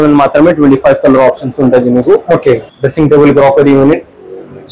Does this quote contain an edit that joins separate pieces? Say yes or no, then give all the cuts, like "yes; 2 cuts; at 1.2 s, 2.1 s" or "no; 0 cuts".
yes; 1 cut; at 2.7 s